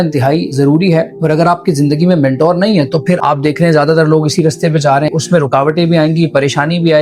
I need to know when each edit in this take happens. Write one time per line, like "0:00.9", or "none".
0:01.1
0:03.2
0:05.1